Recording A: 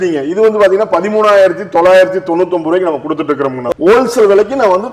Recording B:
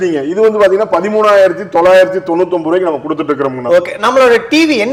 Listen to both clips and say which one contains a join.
A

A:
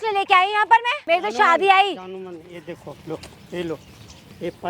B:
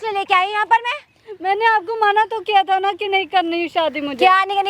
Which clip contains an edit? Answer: A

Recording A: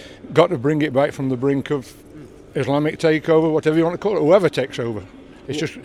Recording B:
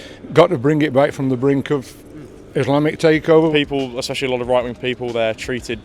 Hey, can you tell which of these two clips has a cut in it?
B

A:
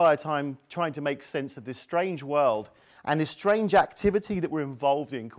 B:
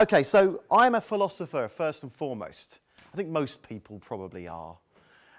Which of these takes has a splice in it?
A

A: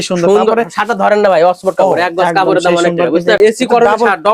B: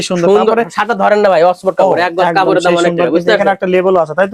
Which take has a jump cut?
A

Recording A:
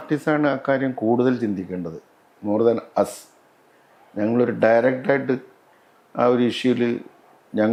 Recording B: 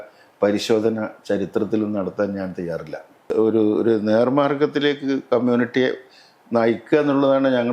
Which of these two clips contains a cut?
B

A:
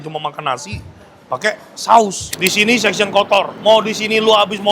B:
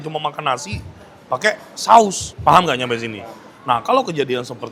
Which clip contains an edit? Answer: A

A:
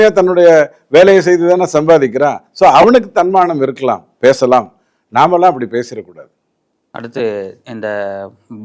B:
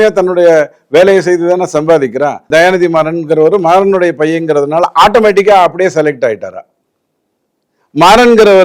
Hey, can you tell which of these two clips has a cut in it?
B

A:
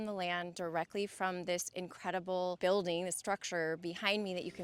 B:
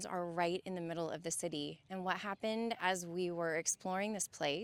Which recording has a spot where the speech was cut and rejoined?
A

